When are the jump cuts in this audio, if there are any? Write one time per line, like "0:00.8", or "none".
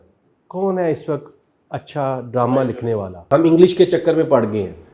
0:03.1